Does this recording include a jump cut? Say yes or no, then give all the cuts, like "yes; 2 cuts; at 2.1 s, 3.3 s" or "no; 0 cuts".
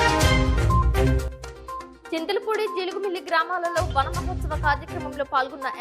yes; 1 cut; at 1.9 s